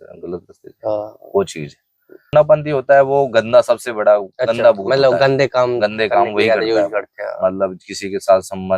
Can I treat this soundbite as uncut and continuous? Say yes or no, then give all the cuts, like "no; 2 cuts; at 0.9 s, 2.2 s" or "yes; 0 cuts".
no; 1 cut; at 2.3 s